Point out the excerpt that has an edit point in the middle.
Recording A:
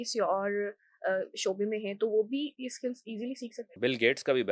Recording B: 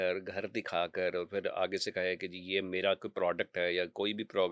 A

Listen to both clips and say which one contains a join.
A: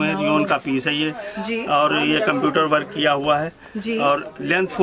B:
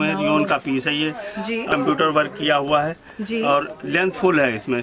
B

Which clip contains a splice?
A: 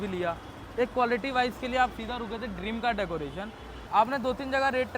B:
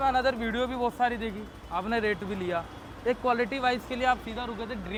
A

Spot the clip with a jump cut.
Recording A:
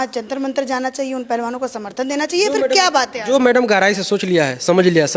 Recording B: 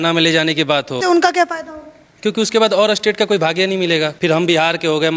B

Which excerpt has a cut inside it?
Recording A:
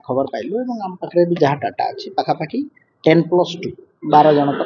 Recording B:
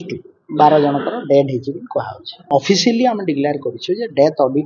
B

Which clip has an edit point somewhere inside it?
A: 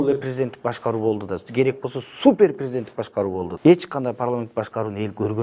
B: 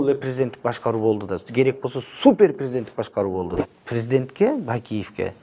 B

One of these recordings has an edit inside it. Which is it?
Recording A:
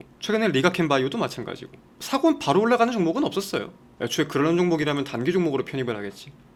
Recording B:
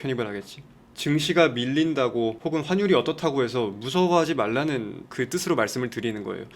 B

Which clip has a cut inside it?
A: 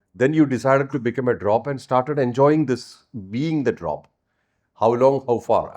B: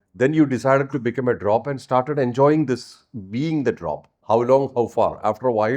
B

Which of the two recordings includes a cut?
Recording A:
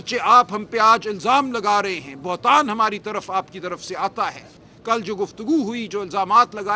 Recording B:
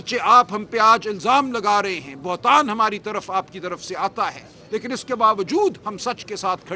A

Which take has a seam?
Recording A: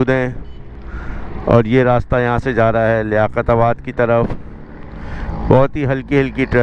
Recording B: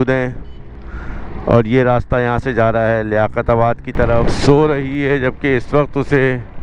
B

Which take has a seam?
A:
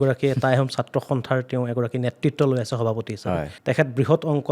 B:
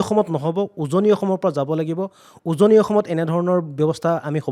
A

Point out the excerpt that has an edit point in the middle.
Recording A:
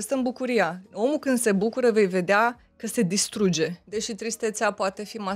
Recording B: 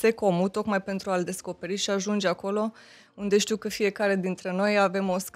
A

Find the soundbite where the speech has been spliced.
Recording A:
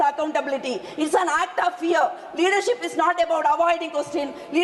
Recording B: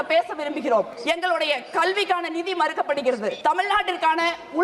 B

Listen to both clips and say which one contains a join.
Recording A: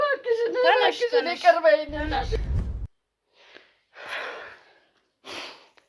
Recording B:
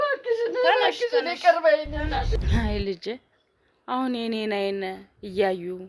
B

